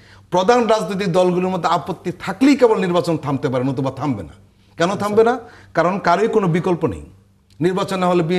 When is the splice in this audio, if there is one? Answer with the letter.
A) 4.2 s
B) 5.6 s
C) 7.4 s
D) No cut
D